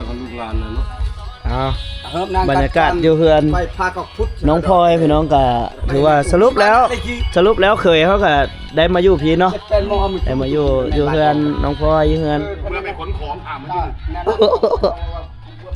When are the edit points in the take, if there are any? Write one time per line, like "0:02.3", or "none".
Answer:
0:12.4